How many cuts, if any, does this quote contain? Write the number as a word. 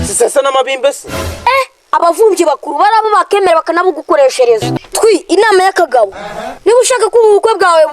one